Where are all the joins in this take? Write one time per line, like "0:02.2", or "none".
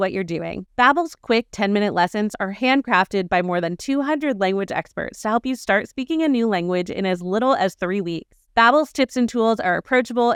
none